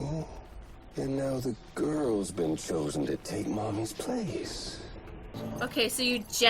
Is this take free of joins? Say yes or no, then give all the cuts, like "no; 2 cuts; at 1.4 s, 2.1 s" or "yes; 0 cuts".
no; 1 cut; at 5.3 s